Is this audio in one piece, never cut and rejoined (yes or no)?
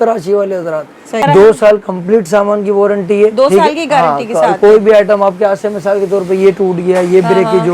no